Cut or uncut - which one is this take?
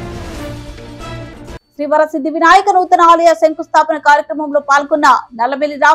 cut